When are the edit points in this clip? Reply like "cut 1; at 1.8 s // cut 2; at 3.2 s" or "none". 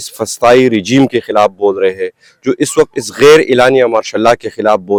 none